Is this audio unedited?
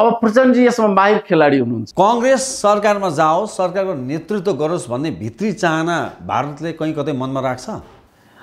no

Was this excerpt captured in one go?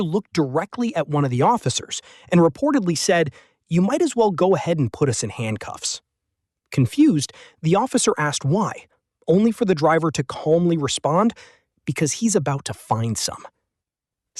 yes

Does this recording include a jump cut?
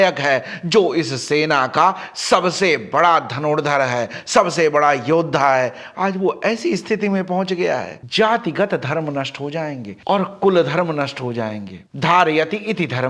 yes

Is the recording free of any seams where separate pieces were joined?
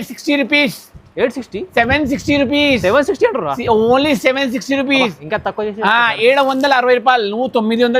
yes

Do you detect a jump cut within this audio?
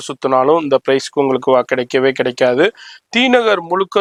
no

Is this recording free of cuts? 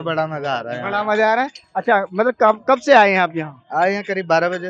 yes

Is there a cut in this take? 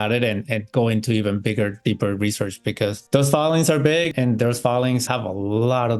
yes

